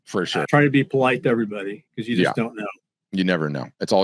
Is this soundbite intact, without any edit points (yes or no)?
yes